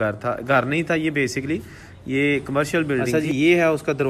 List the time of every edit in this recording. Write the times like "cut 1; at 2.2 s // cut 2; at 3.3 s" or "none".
cut 1; at 3.1 s